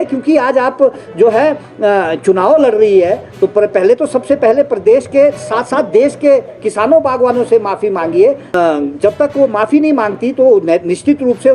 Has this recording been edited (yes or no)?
yes